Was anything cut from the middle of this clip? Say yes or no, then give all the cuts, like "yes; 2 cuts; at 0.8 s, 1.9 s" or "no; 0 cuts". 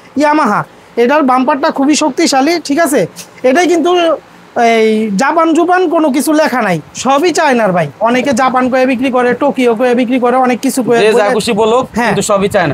no; 0 cuts